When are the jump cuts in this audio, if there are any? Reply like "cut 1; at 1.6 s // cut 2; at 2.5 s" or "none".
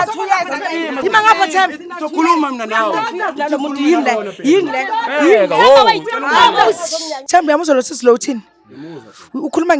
cut 1; at 7.1 s